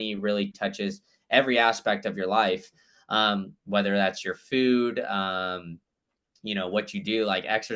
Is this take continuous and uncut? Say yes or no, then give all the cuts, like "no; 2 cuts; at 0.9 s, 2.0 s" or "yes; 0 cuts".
yes; 0 cuts